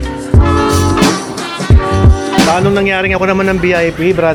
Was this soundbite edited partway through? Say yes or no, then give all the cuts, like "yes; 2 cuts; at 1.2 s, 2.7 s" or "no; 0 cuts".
no; 0 cuts